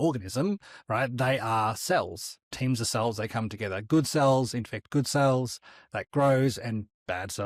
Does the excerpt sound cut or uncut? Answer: uncut